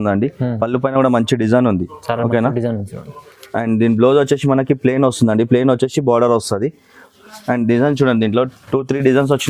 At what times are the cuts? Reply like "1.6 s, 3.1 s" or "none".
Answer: none